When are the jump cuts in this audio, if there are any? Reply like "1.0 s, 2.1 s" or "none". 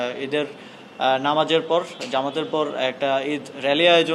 none